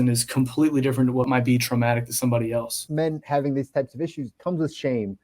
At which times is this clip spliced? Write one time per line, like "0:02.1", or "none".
0:01.3
0:02.8
0:04.3